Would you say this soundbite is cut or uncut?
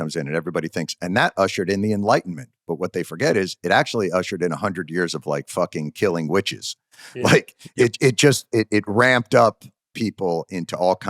uncut